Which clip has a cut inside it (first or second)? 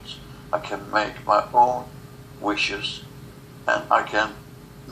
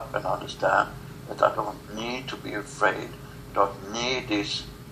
second